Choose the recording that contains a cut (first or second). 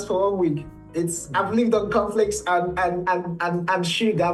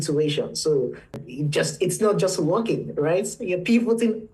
second